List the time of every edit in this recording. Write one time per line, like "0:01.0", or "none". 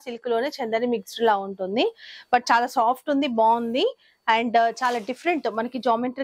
none